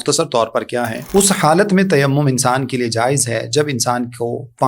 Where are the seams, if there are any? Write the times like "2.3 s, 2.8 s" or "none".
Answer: 1.0 s